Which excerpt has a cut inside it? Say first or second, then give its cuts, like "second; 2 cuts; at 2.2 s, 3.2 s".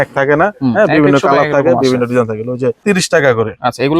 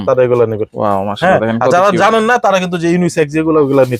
first; 1 cut; at 2.8 s